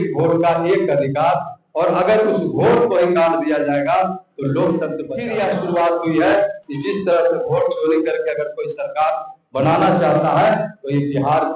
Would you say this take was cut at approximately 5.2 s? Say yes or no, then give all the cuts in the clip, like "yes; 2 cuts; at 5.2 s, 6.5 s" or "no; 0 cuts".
yes; 1 cut; at 5.2 s